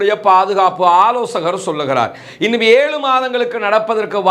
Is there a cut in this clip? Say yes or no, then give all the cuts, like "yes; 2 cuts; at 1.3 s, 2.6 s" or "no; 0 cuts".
no; 0 cuts